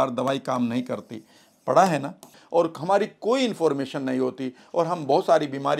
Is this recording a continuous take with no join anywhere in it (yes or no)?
no